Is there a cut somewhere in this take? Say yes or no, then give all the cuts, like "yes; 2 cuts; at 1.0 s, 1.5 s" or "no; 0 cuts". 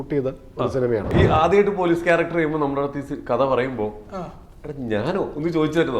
yes; 1 cut; at 1.1 s